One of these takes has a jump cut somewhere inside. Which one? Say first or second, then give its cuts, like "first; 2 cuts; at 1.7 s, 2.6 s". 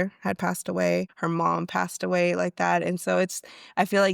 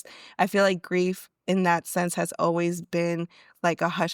first; 1 cut; at 1.1 s